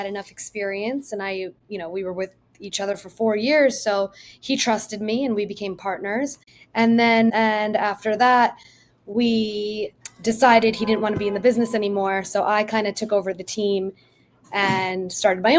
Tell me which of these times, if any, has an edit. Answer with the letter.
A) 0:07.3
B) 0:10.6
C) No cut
A